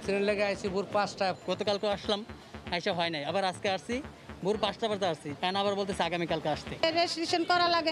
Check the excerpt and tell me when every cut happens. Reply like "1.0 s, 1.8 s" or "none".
1.3 s, 6.8 s